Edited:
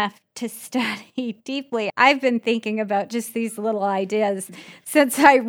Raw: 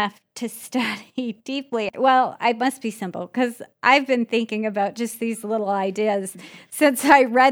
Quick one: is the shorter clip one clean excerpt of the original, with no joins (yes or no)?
no